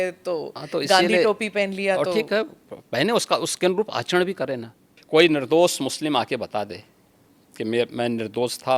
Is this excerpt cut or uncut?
cut